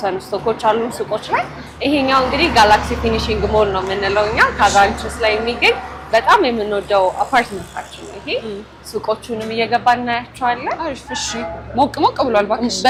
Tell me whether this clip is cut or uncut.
uncut